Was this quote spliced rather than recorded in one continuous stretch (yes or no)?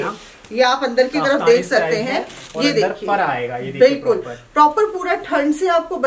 no